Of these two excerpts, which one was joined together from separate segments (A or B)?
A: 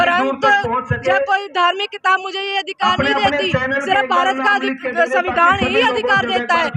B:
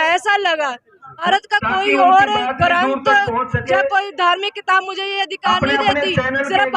B